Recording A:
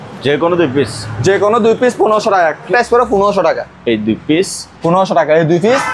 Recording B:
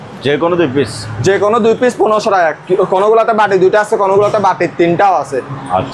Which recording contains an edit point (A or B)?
A